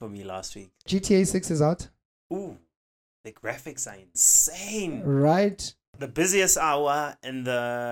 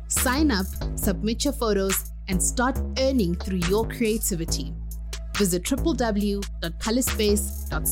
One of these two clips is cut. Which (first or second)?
first